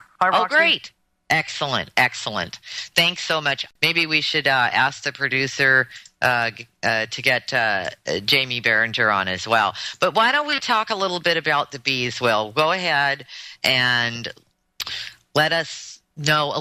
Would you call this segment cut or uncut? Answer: uncut